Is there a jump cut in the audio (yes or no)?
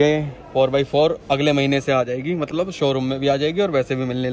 no